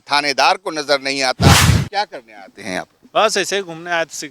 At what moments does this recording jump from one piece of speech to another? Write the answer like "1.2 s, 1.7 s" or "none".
1.7 s

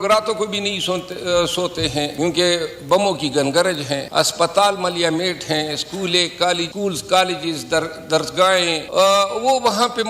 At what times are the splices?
2.1 s, 4.0 s, 6.7 s, 8.8 s

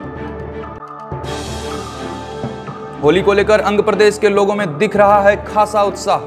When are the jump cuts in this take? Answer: 0.7 s, 2.6 s

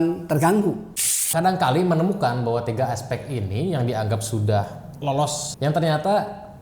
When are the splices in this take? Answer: 1.3 s, 5.4 s

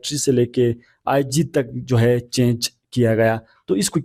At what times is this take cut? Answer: none

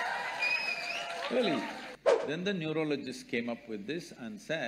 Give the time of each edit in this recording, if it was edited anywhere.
1.8 s

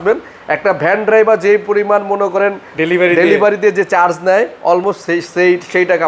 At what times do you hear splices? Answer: none

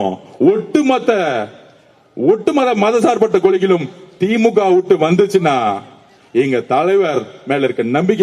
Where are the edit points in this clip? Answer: none

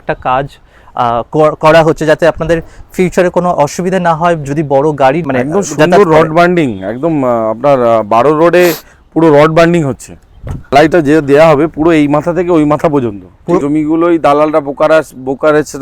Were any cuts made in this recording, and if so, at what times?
5.2 s, 10.7 s, 13.6 s

